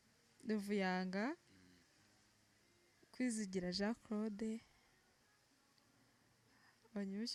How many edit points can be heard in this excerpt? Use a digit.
0